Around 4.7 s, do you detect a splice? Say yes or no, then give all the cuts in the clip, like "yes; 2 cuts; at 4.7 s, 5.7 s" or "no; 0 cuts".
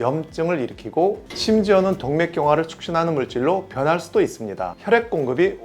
yes; 1 cut; at 4.7 s